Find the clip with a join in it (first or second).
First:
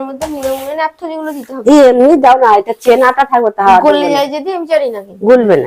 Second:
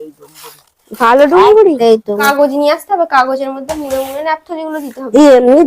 second